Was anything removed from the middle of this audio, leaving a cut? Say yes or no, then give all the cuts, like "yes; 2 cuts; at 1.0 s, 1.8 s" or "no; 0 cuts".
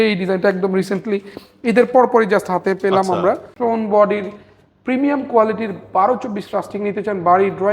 yes; 1 cut; at 3.5 s